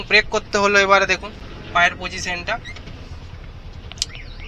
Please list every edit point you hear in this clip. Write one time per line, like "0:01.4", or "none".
none